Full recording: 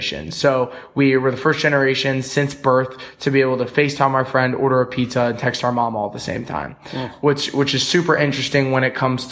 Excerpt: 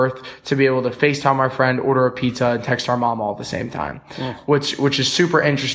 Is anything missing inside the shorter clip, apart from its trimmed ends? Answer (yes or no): no